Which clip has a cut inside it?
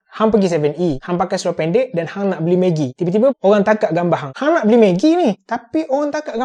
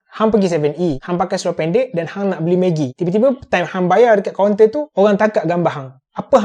first; 2 cuts; at 3.4 s, 4.3 s

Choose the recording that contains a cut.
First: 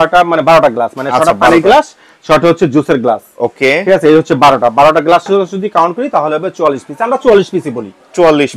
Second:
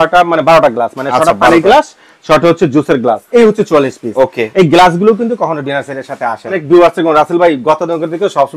second; 2 cuts; at 3.2 s, 6.6 s

